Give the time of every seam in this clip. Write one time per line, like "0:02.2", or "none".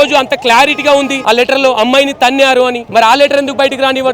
0:01.2
0:02.8